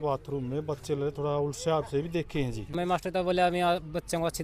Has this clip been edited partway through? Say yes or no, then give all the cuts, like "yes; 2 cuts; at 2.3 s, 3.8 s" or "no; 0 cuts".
yes; 1 cut; at 2.6 s